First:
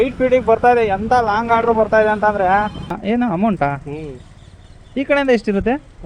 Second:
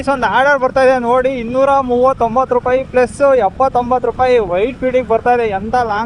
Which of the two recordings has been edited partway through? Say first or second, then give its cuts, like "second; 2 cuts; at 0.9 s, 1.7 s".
first; 1 cut; at 3.0 s